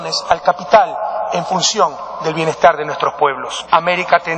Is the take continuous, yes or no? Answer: yes